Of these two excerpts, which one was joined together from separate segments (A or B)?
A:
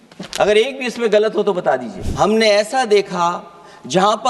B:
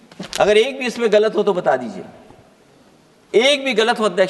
A